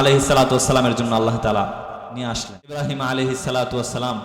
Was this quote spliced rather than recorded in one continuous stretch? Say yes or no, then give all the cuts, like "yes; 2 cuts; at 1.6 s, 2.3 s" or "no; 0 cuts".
yes; 1 cut; at 2.6 s